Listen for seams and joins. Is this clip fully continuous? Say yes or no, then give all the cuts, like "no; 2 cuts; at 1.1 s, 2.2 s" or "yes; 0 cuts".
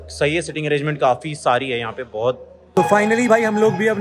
no; 1 cut; at 2.5 s